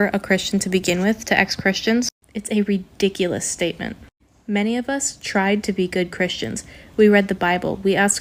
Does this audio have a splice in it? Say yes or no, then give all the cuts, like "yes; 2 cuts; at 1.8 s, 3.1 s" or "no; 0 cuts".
no; 0 cuts